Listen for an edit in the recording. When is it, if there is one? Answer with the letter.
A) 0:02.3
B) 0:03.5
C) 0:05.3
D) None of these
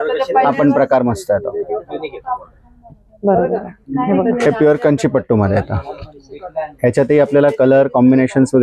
D